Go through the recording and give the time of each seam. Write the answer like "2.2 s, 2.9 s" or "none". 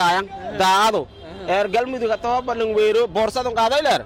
none